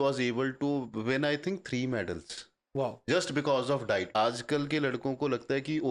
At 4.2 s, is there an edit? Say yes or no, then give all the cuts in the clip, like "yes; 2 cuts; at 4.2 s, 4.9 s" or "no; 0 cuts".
yes; 1 cut; at 4.2 s